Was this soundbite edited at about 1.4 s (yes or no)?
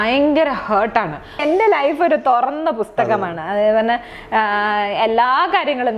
yes